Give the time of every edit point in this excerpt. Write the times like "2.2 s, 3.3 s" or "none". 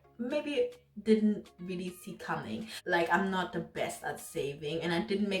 2.7 s